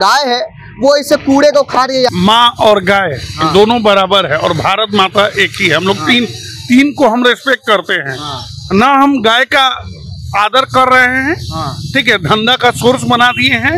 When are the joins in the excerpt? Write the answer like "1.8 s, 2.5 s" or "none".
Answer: 2.1 s